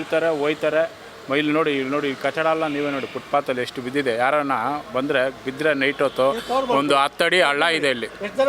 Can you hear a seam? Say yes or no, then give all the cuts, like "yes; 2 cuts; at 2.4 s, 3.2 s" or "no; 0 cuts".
no; 0 cuts